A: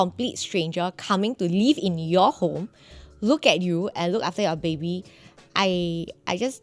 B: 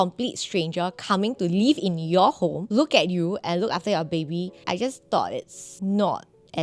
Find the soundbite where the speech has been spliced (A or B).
B